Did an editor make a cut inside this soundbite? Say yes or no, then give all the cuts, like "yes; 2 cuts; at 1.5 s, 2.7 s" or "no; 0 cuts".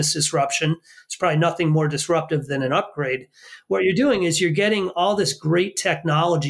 no; 0 cuts